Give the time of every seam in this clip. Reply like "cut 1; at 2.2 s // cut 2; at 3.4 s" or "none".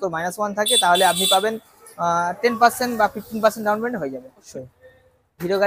cut 1; at 4.5 s